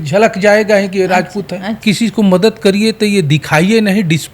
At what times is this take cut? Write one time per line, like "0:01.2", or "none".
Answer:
0:01.8